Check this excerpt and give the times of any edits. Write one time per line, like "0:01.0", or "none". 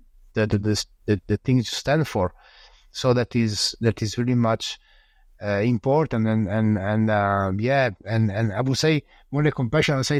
none